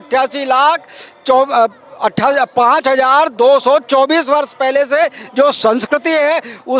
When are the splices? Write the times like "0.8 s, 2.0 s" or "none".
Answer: none